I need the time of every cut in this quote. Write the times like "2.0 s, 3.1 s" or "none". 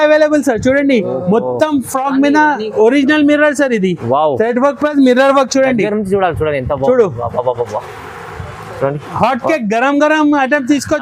none